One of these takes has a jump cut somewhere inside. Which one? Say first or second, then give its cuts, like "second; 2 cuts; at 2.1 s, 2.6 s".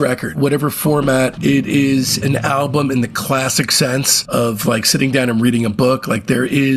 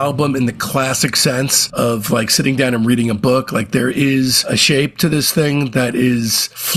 first; 1 cut; at 1.4 s